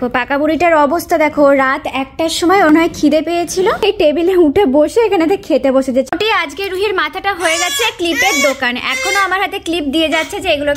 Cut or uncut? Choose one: cut